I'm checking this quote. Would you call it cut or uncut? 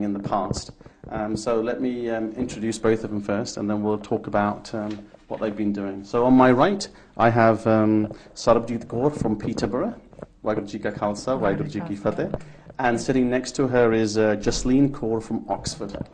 uncut